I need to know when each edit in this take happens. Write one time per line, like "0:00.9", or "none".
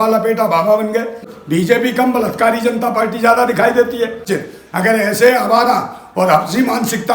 0:01.2
0:04.2